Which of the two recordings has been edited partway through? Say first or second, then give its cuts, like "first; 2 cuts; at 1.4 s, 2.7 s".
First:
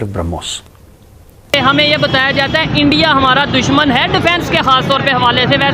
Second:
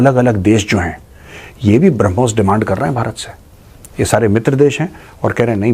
first; 1 cut; at 1.5 s